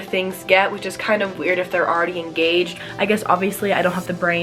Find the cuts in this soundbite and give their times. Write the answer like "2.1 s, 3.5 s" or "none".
2.8 s